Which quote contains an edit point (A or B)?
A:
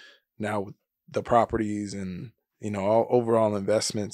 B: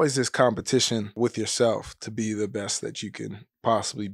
B